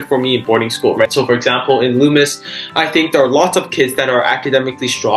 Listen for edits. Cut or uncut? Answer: uncut